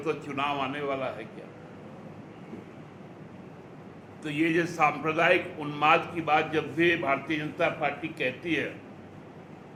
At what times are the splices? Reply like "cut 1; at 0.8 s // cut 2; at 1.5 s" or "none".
none